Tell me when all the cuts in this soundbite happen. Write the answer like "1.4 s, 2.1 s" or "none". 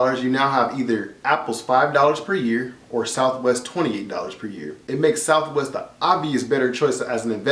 4.8 s